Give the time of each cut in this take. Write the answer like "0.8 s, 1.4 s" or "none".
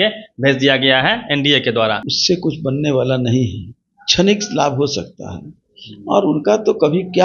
2.1 s